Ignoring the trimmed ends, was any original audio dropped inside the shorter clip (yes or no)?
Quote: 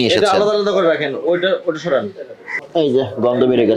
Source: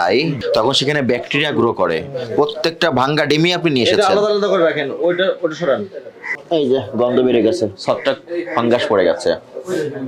no